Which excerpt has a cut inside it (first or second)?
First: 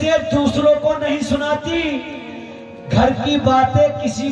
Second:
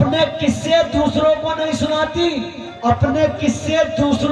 second